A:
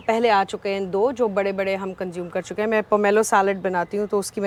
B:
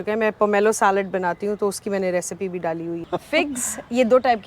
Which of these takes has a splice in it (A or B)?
B